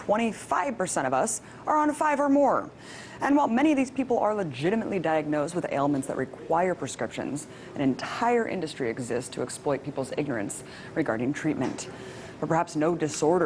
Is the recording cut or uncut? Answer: cut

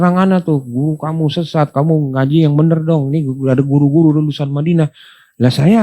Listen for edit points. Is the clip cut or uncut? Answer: uncut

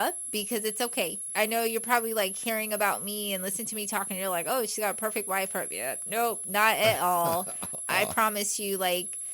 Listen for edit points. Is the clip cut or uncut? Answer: cut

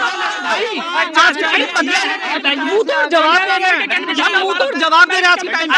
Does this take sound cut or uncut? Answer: uncut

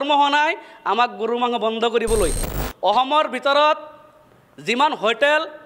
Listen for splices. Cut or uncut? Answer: cut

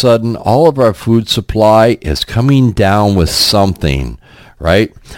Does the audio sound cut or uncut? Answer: uncut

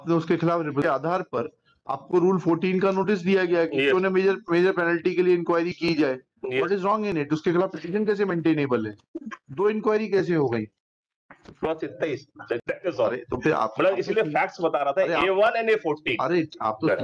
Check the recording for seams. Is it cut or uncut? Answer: cut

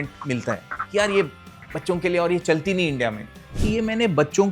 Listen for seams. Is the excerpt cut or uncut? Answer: cut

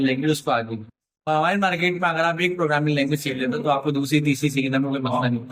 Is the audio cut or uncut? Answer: uncut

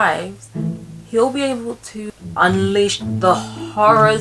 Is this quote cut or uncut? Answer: cut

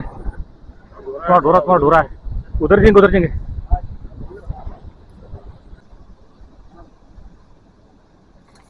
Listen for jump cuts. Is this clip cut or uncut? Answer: cut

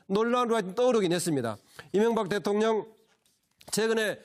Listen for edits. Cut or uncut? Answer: uncut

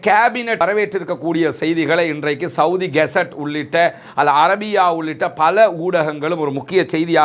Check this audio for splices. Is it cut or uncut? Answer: uncut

